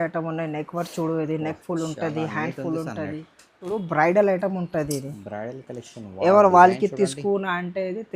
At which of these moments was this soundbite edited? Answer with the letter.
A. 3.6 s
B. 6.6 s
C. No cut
A